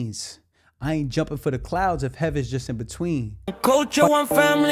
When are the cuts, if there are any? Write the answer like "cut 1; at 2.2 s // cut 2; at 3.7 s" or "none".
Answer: cut 1; at 3.5 s